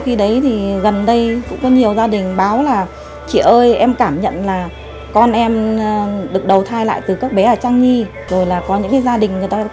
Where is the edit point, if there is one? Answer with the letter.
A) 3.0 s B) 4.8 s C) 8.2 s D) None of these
C